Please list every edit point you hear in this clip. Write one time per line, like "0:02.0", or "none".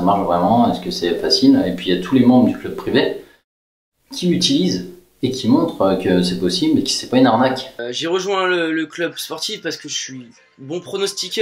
0:07.8